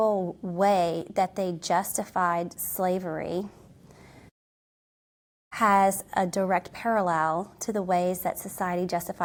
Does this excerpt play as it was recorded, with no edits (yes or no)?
yes